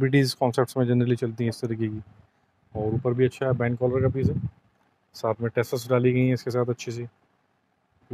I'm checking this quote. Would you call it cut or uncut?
uncut